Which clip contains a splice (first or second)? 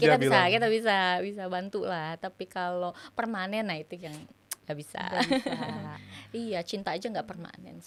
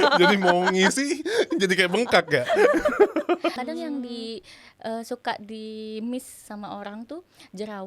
second